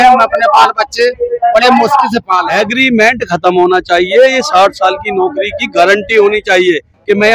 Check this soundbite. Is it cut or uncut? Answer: cut